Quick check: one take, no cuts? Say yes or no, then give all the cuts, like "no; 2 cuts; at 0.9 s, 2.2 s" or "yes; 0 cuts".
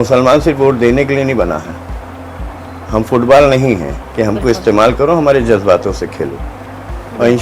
yes; 0 cuts